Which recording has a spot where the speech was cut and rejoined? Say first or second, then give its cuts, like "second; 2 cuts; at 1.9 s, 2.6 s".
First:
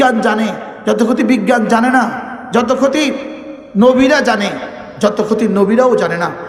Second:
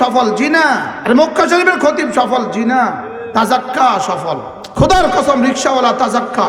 second; 2 cuts; at 0.9 s, 4.6 s